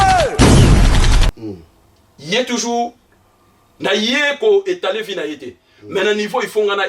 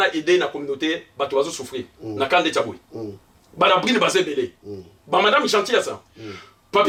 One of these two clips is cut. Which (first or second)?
first